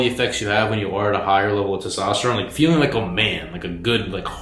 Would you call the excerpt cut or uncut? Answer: uncut